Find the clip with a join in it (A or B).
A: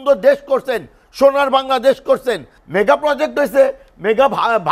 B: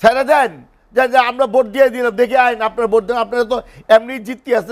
A